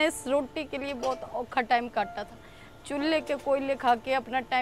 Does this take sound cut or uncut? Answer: uncut